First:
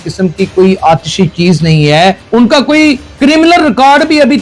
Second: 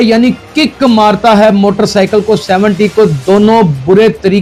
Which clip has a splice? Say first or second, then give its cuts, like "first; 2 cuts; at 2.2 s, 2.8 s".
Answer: first; 2 cuts; at 2.2 s, 3.1 s